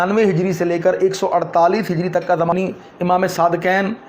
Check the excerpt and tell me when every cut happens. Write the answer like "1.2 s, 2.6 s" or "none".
2.5 s